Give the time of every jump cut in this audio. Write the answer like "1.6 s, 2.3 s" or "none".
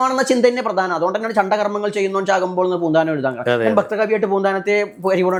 none

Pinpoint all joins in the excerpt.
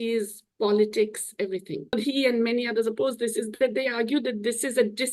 1.9 s

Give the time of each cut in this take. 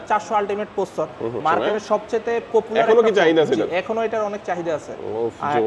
1.4 s

